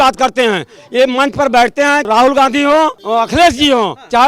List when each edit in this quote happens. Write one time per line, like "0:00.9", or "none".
0:02.1
0:03.0